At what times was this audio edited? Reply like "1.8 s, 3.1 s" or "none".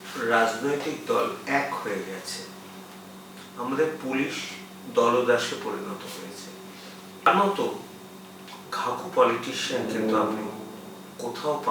7.3 s